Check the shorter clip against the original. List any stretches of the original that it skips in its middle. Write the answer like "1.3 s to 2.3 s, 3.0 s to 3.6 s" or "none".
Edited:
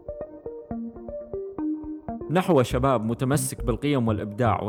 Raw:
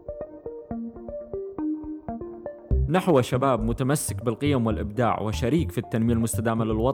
2.3 s to 2.8 s